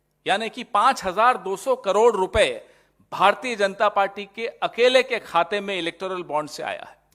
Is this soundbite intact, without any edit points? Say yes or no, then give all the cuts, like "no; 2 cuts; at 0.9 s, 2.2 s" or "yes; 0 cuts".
yes; 0 cuts